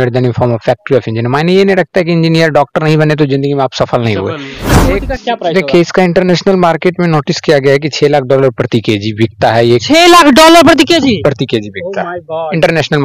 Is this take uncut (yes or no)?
no